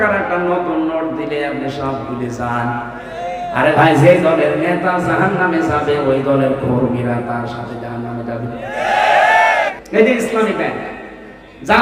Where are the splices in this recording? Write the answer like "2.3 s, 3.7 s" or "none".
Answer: 9.7 s